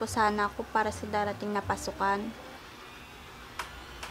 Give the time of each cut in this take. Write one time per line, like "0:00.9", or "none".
none